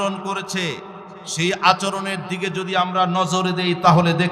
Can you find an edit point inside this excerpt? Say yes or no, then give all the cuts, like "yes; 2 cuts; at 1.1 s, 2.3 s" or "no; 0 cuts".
no; 0 cuts